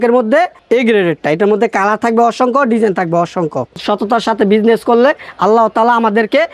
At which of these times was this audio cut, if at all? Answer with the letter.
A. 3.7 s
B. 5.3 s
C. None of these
A